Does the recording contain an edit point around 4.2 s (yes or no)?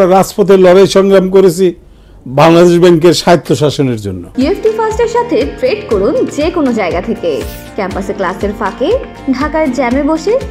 yes